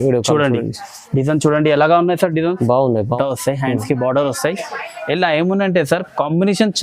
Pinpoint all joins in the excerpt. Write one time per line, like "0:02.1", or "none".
0:03.2